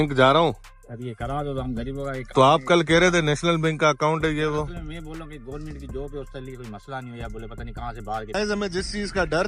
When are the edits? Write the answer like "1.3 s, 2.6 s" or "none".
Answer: 8.4 s